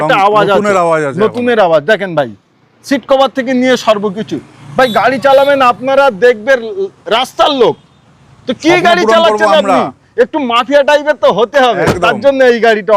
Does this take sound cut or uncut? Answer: uncut